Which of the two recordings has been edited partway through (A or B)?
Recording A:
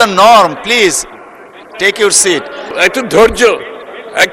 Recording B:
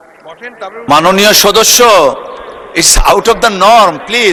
A